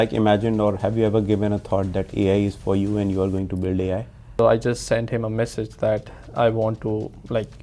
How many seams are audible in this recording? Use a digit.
1